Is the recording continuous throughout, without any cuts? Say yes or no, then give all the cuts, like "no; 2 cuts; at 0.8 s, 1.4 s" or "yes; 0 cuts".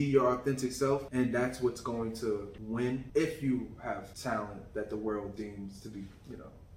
no; 3 cuts; at 1.1 s, 2.9 s, 4.1 s